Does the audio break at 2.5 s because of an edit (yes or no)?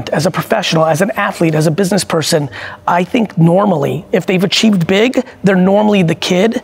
no